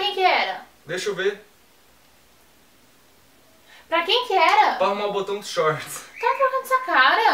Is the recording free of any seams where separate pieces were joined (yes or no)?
no